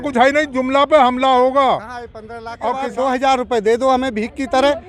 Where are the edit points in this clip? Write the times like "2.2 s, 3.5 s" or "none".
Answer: 2.8 s